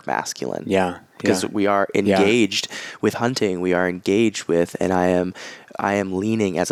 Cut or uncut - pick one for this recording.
uncut